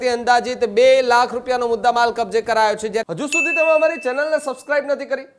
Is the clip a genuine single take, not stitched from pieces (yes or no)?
no